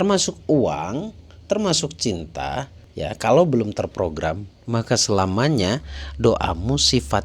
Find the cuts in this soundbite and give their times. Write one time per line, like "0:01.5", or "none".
0:02.8